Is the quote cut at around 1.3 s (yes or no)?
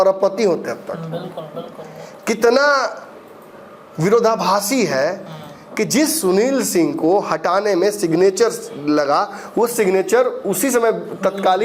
no